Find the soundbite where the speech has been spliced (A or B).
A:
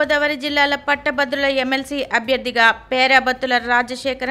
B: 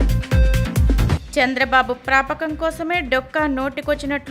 B